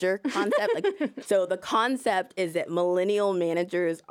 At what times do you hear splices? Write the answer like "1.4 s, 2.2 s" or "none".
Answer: 1.2 s